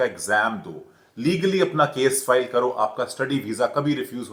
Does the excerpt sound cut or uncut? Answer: uncut